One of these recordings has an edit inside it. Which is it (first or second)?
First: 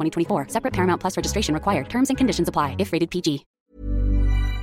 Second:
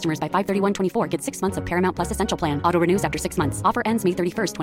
first